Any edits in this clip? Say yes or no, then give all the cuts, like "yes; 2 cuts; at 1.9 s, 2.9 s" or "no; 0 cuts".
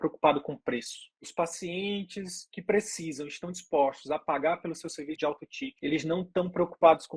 yes; 3 cuts; at 1.2 s, 2.5 s, 5.2 s